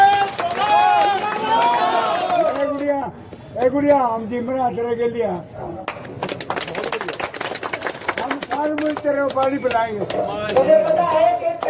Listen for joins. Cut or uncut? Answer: uncut